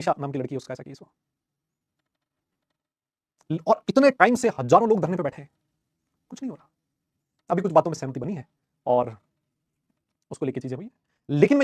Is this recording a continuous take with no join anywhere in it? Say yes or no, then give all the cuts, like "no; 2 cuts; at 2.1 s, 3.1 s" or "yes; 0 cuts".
yes; 0 cuts